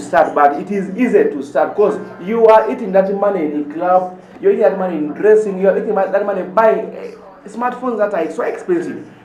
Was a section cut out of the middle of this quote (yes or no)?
no